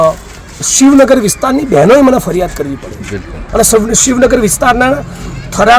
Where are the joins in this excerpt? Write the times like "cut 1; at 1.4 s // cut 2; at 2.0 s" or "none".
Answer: cut 1; at 3.4 s